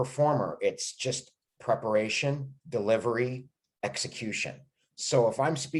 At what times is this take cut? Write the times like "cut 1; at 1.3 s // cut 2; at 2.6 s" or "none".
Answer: none